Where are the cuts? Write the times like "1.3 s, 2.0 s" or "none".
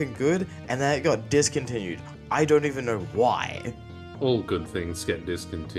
none